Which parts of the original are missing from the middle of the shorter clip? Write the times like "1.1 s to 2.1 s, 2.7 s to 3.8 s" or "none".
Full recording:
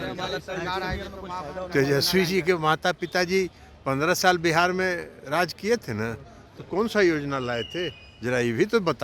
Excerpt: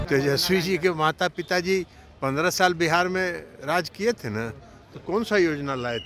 none